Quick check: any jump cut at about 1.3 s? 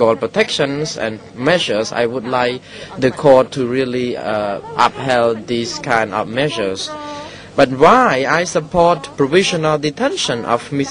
no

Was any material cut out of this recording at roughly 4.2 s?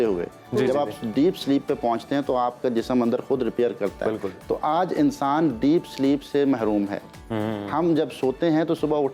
no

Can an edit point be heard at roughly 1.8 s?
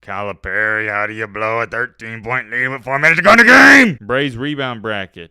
no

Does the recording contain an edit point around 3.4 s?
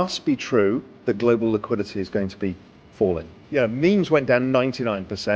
yes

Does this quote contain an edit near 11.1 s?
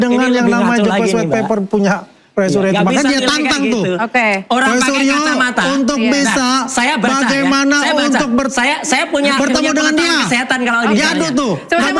no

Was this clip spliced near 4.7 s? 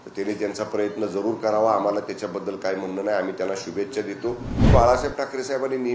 yes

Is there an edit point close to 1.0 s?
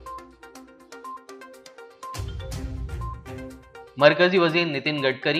yes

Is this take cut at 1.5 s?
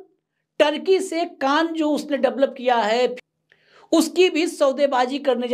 no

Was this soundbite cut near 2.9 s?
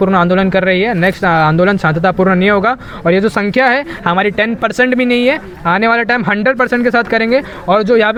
no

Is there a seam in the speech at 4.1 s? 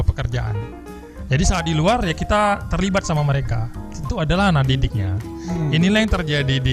yes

